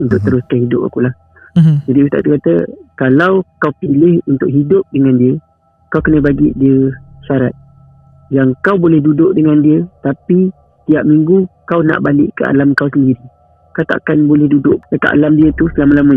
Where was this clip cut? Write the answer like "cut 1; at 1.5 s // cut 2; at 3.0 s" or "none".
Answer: cut 1; at 14.8 s